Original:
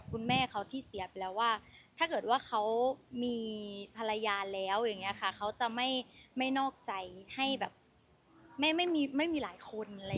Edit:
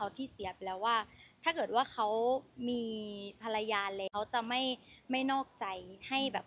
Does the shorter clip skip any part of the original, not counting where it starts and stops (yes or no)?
yes